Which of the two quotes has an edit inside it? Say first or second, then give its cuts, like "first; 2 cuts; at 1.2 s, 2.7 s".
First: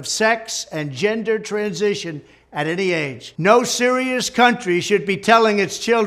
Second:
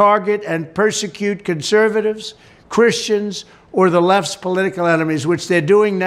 first; 1 cut; at 3.2 s